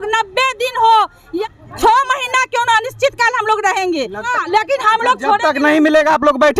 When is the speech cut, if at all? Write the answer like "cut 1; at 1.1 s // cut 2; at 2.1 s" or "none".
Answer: cut 1; at 1.3 s // cut 2; at 4.3 s